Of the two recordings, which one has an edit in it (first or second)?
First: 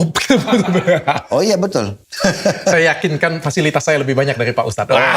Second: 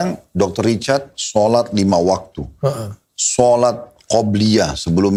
first